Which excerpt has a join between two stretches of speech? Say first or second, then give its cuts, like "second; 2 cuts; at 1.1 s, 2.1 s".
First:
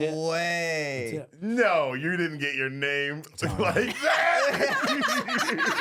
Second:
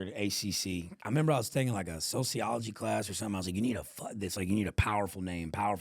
second; 1 cut; at 1.0 s